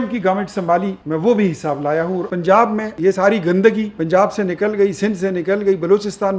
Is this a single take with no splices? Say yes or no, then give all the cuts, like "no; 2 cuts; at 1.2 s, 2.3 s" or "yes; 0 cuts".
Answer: no; 4 cuts; at 1.0 s, 2.3 s, 3.0 s, 3.9 s